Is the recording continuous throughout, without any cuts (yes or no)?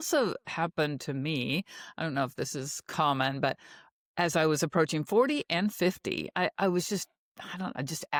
yes